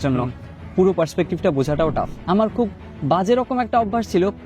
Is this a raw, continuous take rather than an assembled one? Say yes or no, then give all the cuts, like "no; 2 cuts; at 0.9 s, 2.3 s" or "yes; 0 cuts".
no; 1 cut; at 2.1 s